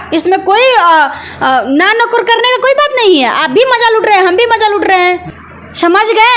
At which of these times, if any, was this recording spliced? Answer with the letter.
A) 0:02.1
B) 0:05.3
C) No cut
B